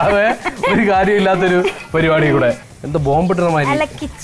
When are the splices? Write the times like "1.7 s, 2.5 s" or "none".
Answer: 2.7 s